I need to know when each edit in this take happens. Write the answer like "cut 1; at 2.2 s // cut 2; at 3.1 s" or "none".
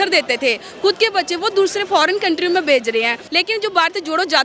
cut 1; at 3.2 s